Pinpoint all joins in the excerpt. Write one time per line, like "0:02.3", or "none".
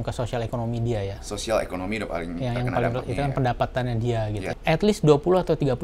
0:04.5